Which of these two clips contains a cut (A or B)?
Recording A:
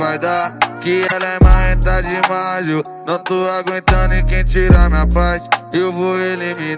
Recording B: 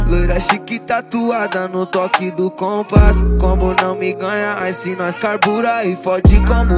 A